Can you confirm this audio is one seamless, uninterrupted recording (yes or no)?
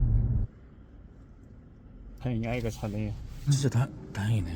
no